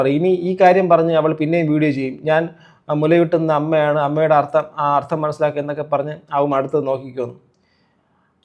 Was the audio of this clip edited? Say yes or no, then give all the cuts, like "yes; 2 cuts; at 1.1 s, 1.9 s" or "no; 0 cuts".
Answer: no; 0 cuts